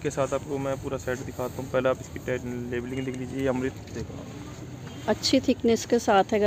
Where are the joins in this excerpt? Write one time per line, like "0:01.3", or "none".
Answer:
0:03.7